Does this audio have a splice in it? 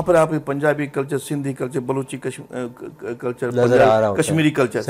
no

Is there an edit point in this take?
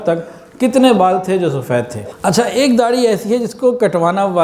yes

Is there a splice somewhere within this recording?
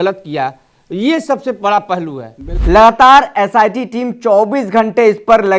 yes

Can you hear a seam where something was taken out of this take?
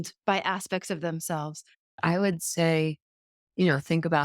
yes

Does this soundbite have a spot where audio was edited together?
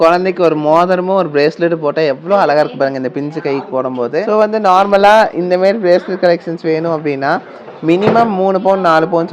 yes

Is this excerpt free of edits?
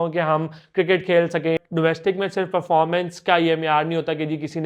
no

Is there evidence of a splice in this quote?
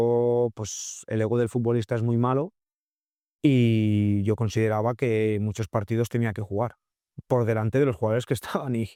no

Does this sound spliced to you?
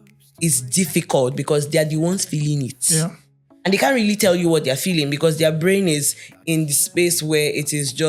no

